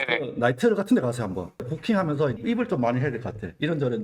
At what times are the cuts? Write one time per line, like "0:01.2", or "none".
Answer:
0:01.6